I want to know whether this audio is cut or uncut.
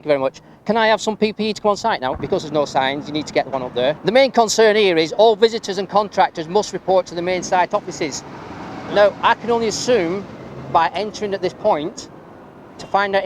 cut